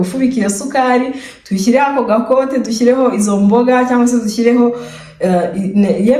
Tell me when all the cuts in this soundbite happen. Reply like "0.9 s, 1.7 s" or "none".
none

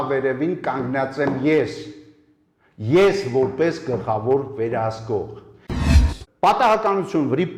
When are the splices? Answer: 5.9 s

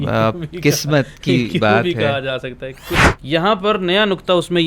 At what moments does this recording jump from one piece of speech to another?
3.0 s

